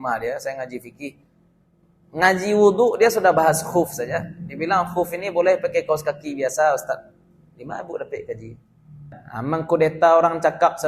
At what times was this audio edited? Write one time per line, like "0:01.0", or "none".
0:09.2